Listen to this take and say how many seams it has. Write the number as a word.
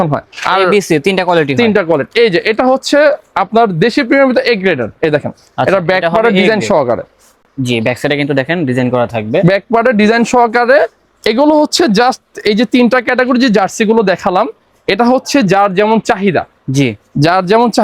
zero